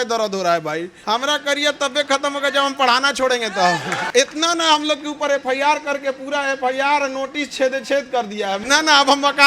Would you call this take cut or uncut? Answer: cut